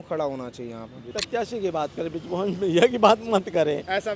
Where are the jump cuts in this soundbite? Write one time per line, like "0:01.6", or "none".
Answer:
0:01.1